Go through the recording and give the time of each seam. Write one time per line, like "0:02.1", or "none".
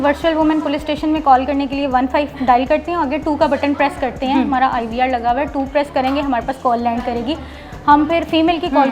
none